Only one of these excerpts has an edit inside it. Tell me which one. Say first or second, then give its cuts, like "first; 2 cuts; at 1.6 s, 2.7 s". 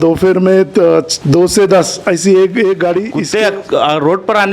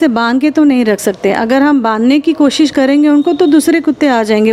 first; 2 cuts; at 1.2 s, 3.2 s